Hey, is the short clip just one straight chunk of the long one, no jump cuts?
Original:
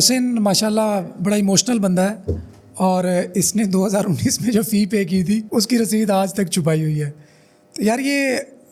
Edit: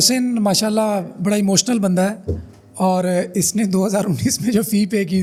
yes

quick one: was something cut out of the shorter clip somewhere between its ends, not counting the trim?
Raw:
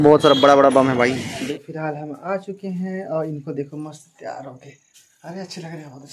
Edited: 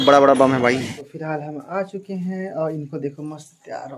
yes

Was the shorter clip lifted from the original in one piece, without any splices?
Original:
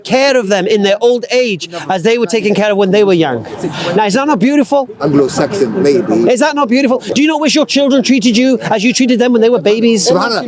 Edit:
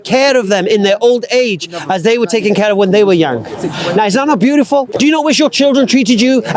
no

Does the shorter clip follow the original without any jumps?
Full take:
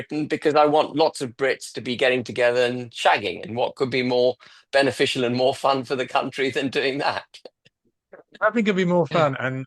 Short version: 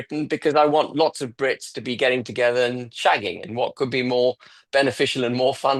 yes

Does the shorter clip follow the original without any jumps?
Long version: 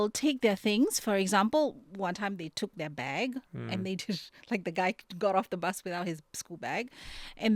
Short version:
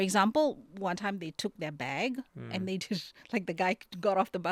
yes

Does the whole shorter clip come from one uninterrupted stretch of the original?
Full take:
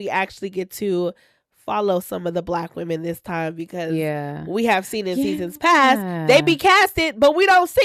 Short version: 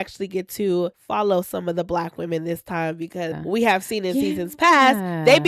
no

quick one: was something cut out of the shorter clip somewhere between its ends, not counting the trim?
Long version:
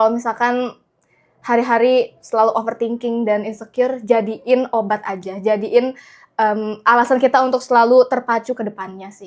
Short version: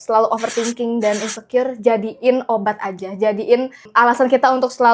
yes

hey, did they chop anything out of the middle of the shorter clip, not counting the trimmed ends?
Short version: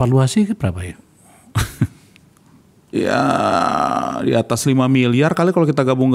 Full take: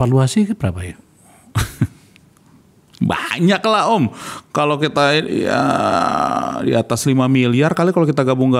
yes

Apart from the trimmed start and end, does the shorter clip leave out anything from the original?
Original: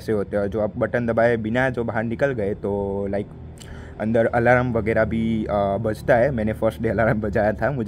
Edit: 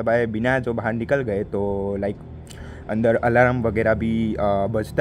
no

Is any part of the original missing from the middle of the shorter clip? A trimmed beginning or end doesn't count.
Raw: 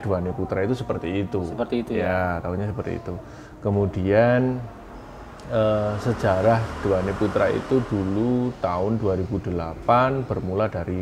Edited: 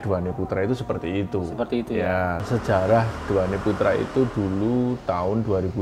yes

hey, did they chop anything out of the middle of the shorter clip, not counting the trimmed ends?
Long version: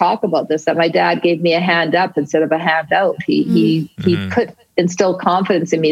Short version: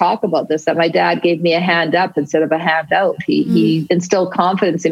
yes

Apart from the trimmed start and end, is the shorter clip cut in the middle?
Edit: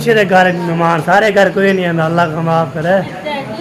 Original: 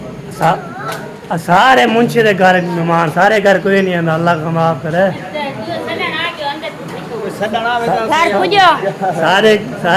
no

